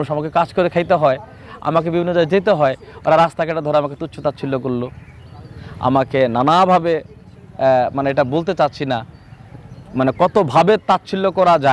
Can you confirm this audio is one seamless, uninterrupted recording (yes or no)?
yes